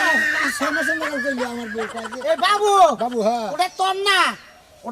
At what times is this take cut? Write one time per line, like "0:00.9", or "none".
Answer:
0:02.1